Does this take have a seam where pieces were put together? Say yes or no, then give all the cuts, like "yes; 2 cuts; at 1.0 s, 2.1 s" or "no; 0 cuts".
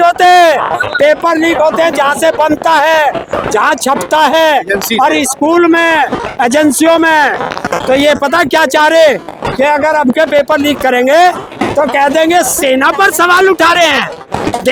no; 0 cuts